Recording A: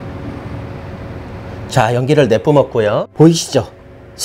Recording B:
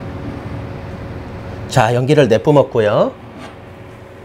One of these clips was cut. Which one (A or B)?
A